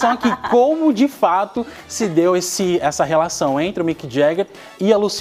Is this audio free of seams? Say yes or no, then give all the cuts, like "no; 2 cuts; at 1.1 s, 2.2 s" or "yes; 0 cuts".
yes; 0 cuts